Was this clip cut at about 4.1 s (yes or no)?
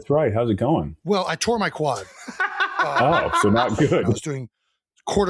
yes